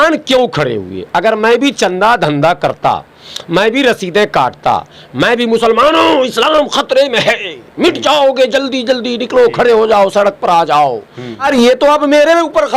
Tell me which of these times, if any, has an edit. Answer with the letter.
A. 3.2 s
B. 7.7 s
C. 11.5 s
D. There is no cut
C